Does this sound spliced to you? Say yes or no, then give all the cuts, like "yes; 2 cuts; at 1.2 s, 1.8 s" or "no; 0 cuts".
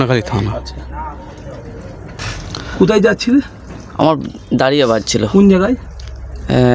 no; 0 cuts